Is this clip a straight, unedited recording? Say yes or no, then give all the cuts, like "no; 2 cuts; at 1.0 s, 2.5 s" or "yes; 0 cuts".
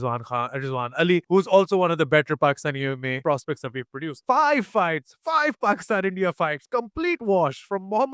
no; 3 cuts; at 1.2 s, 3.2 s, 4.1 s